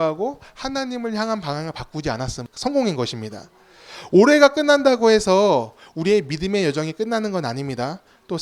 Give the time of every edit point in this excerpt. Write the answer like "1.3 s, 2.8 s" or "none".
2.5 s